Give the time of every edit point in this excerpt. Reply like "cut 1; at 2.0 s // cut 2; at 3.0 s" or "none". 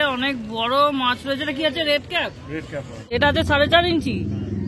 cut 1; at 3.1 s